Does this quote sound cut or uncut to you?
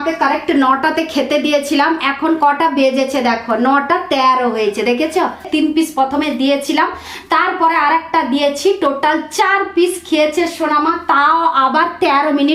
cut